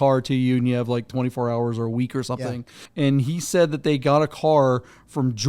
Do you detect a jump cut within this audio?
yes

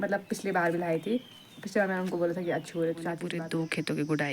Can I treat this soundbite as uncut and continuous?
no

